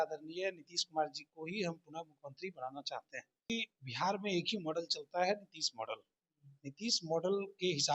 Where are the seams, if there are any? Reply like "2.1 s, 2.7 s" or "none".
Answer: 3.5 s